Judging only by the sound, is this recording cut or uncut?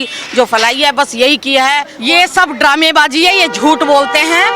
cut